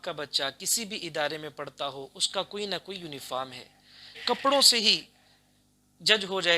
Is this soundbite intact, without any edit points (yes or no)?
no